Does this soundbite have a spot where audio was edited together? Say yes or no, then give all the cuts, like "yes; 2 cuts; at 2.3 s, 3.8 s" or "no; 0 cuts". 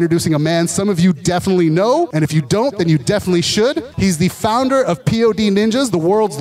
yes; 2 cuts; at 2.1 s, 3.9 s